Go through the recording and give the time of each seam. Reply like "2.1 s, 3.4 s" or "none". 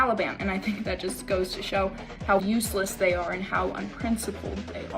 2.4 s